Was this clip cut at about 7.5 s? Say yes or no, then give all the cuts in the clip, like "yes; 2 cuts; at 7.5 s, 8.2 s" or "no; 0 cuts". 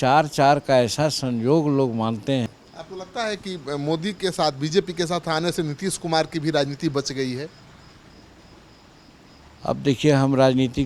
no; 1 cut; at 2.5 s